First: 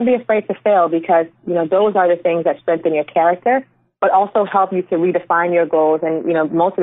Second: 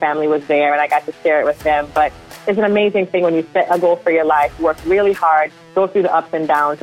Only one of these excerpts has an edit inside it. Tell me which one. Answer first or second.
second